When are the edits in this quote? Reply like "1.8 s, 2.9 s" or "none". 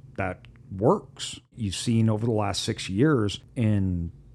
1.5 s, 3.4 s

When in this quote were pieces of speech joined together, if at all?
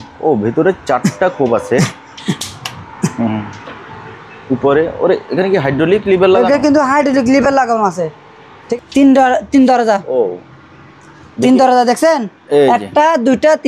2.2 s, 8.8 s

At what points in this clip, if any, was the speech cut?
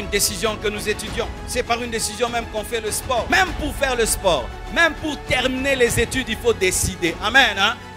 1.4 s, 3.3 s

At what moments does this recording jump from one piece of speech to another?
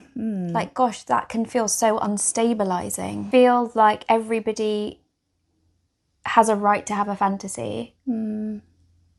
3.2 s

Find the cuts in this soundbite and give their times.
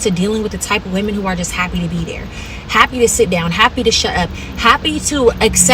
3.3 s

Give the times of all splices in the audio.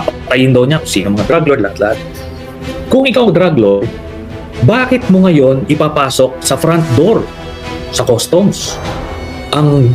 2.2 s

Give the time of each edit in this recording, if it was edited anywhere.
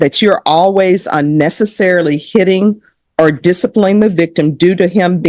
none

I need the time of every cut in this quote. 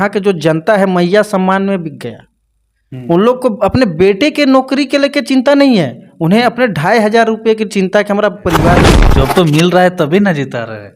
9.0 s

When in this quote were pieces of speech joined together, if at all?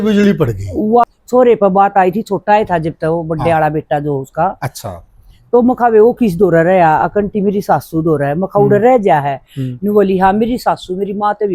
1.0 s

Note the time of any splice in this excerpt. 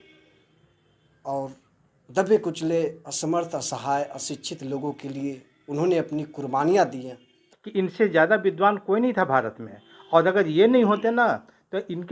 7.5 s

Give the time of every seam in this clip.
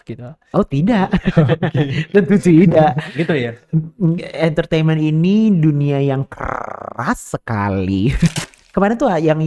8.5 s

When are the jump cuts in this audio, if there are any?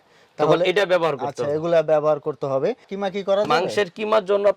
2.9 s

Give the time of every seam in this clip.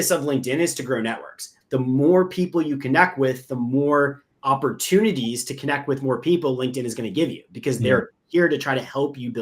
1.5 s, 4.3 s

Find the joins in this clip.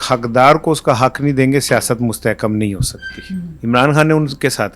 3.5 s

